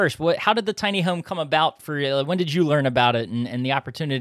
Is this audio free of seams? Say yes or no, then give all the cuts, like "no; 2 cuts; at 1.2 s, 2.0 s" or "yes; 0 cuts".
yes; 0 cuts